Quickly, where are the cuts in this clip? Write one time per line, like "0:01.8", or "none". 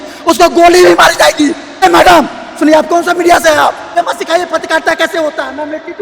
0:01.8
0:03.9